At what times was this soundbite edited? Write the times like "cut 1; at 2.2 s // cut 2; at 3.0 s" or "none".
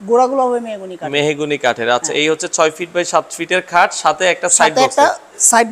none